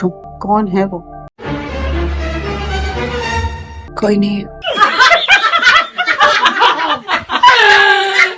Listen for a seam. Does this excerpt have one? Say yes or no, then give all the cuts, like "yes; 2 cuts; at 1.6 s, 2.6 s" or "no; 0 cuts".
no; 0 cuts